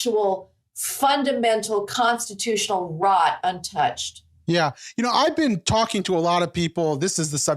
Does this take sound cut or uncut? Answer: uncut